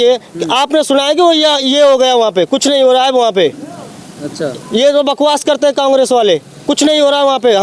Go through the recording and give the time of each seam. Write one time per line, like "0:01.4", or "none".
none